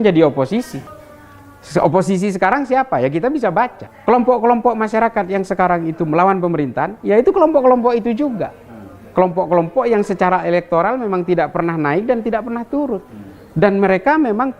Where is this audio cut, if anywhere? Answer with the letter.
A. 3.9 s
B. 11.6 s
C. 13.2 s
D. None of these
A